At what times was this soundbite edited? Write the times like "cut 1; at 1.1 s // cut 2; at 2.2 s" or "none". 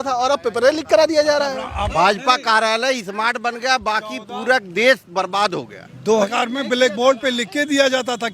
cut 1; at 1.9 s // cut 2; at 6.3 s